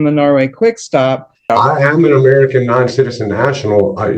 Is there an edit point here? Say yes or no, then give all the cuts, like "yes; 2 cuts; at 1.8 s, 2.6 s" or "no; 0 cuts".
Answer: yes; 1 cut; at 1.5 s